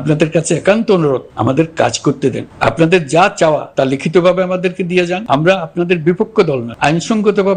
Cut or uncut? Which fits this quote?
cut